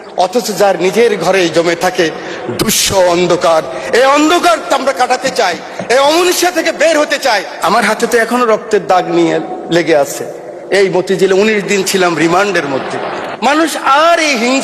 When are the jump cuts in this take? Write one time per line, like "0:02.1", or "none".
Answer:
0:07.5
0:13.2